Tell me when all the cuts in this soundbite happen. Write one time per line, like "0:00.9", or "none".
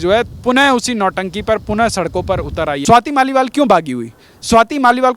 0:02.8